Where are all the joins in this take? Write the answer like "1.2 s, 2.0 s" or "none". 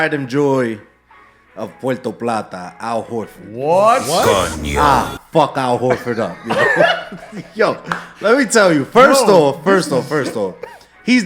none